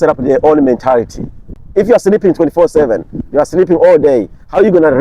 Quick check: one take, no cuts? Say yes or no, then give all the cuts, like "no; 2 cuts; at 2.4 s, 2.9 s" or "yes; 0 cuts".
no; 1 cut; at 1.6 s